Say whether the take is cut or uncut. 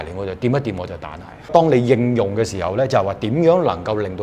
cut